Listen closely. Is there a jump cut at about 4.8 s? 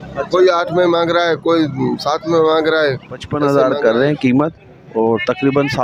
no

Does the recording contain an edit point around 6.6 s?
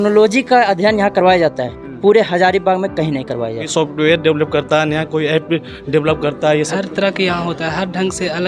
yes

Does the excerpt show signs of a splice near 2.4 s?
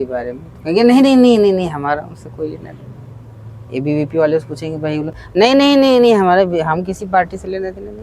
no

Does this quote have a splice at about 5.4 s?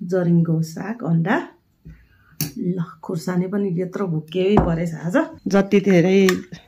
yes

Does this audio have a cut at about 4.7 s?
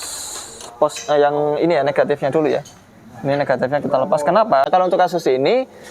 yes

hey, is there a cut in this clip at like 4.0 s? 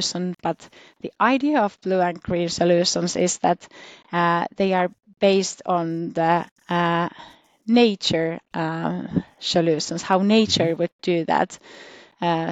no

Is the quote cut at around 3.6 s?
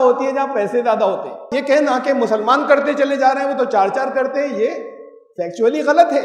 no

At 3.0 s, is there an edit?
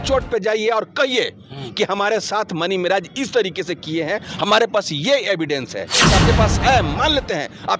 no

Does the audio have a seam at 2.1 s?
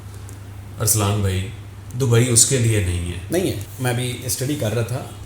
no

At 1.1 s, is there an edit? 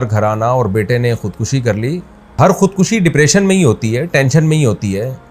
no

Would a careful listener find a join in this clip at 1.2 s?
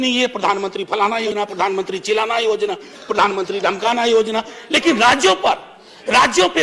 yes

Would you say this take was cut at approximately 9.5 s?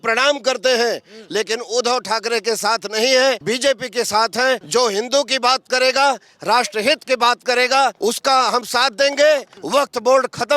yes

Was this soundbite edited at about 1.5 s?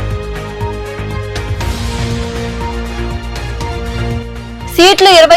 yes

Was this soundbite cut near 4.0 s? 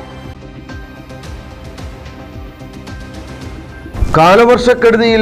yes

